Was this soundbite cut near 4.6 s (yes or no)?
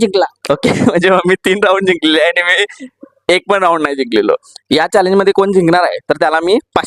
yes